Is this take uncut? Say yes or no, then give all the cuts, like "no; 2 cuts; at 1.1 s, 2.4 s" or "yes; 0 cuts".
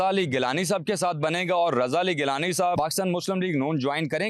no; 1 cut; at 2.8 s